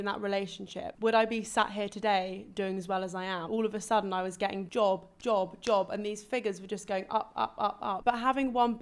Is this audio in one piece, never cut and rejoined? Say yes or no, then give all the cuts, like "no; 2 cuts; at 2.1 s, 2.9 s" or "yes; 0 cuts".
no; 4 cuts; at 0.9 s, 3.5 s, 4.7 s, 8.0 s